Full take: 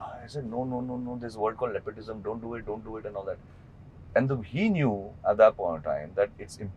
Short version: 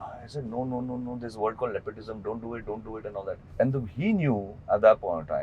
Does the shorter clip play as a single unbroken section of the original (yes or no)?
no